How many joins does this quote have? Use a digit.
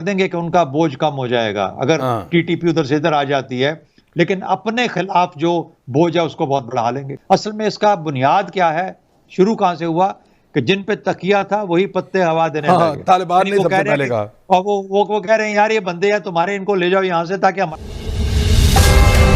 2